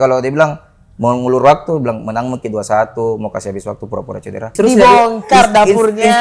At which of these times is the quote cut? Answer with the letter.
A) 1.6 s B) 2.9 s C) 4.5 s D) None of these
C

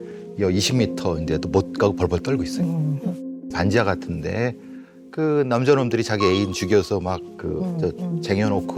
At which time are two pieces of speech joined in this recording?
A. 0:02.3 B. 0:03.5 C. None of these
B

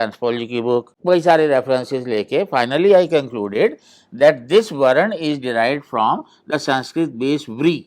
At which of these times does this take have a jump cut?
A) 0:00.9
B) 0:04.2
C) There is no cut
A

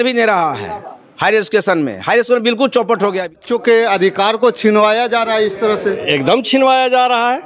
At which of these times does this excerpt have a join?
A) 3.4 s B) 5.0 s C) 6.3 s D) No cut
A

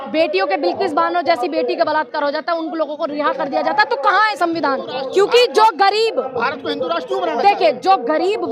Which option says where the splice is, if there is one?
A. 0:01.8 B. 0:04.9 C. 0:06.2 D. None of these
B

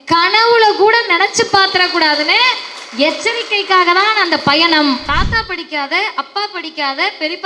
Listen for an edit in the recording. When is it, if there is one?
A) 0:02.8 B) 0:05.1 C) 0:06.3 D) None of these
B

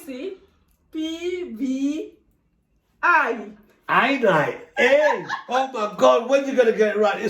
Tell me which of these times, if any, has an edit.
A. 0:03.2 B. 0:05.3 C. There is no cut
B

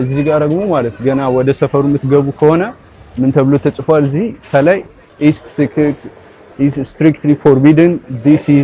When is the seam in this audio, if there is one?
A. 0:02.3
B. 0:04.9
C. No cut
C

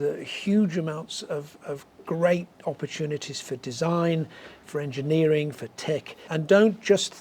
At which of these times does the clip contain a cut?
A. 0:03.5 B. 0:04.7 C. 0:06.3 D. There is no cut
C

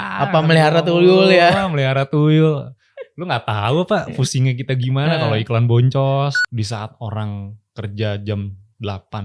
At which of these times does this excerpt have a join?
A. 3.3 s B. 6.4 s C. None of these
B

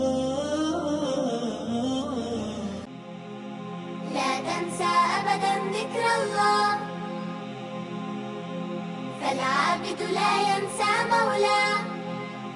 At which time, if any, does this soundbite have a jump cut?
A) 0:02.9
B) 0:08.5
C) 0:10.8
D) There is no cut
A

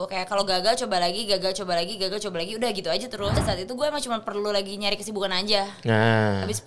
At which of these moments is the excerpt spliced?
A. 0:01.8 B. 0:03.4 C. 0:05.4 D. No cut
B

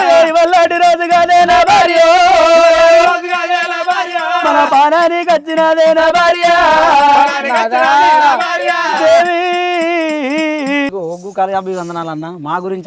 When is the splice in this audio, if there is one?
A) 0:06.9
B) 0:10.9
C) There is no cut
B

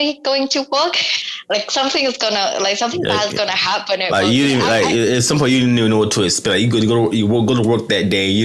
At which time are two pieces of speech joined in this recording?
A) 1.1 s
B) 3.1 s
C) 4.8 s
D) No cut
A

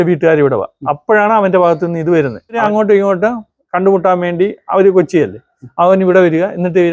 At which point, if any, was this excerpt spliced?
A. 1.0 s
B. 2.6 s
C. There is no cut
B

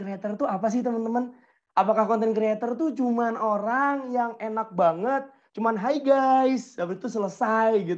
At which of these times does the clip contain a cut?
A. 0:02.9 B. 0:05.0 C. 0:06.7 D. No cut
D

